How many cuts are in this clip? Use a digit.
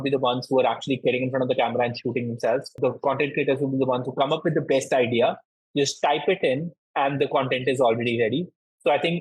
1